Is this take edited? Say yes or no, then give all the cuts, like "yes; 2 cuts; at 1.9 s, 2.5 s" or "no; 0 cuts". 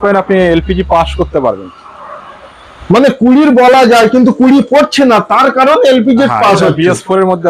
no; 0 cuts